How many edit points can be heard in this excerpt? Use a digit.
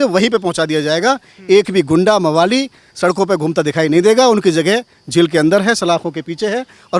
0